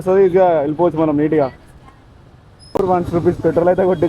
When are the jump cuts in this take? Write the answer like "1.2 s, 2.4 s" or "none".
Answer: 2.8 s